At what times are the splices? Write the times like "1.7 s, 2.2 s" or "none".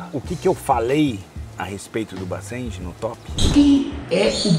3.3 s